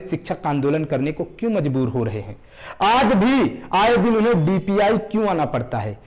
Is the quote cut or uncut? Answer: uncut